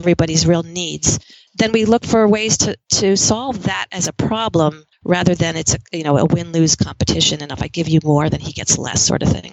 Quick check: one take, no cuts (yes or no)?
no